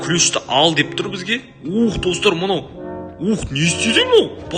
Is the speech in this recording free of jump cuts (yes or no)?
yes